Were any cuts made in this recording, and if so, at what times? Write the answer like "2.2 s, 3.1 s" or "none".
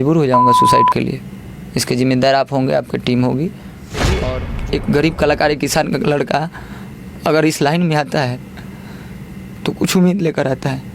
4.2 s